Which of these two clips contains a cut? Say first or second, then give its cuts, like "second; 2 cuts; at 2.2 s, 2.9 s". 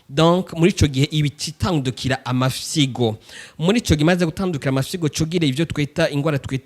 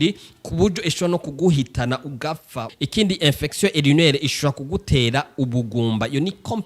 second; 1 cut; at 2.7 s